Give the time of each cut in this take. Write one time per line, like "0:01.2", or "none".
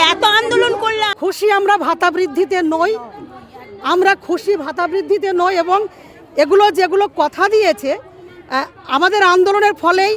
0:01.1